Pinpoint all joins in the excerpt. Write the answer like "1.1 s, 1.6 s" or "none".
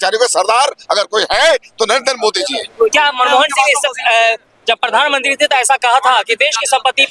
none